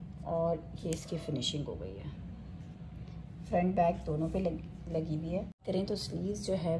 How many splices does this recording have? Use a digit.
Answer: 1